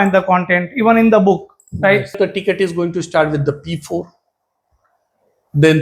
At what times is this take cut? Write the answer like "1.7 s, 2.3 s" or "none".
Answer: 2.1 s

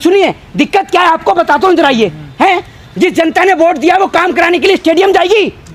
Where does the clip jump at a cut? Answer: none

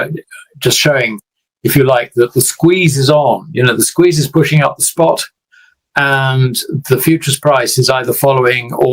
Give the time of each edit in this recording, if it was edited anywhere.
none

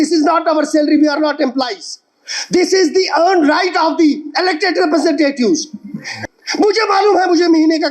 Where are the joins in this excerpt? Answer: 6.3 s

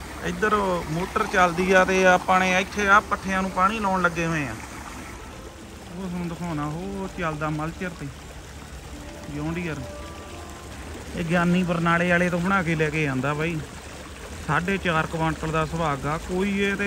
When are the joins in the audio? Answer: 5.2 s, 10.7 s

